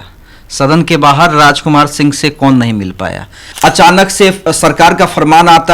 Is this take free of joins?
no; 1 cut; at 3.4 s

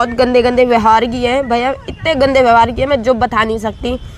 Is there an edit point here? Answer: no; 0 cuts

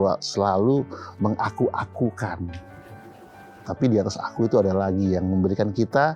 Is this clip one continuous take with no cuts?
yes; 0 cuts

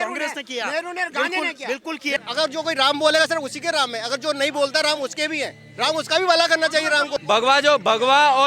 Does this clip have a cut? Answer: yes; 2 cuts; at 2.2 s, 7.1 s

